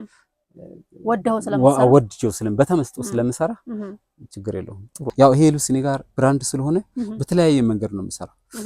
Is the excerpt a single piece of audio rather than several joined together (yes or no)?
no